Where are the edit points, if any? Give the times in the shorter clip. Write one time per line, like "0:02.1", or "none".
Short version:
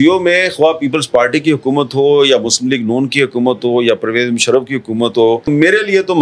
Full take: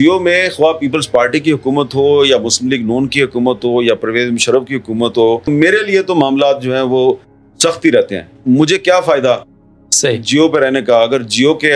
none

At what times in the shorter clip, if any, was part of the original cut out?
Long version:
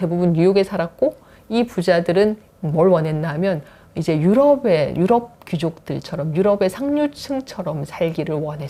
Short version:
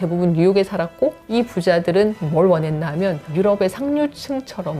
0:01.2
0:02.2
0:03.2

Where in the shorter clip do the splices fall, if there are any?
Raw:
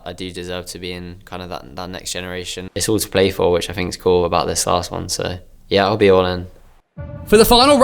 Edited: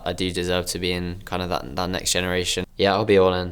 0:02.6

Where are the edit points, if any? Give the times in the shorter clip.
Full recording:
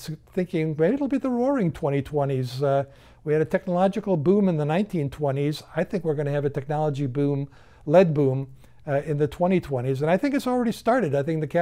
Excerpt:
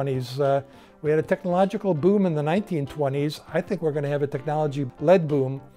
0:04.8

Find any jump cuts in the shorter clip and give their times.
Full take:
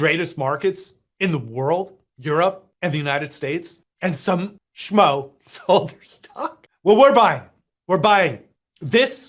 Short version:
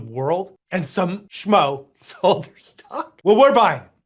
0:00.9
0:03.1

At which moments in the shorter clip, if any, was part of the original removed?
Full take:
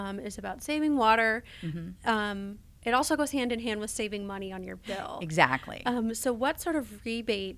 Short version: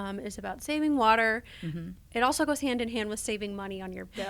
0:01.9

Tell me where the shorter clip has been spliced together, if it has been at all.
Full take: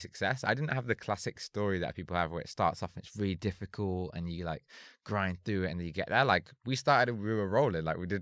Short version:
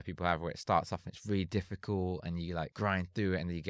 0:02.7

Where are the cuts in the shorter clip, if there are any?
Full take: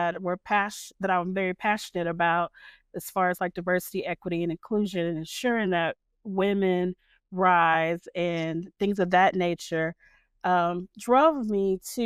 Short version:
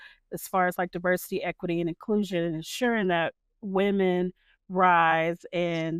none

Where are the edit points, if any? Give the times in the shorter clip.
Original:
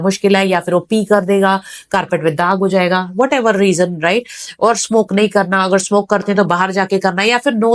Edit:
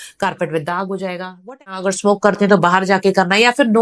0:01.8

